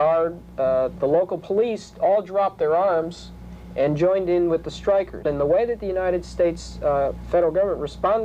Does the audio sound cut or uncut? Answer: cut